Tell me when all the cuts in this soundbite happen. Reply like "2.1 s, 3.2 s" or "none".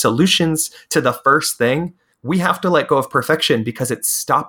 2.1 s